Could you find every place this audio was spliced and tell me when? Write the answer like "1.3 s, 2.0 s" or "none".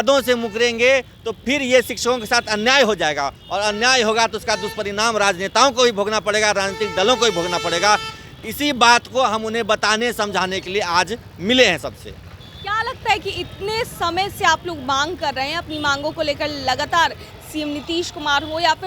none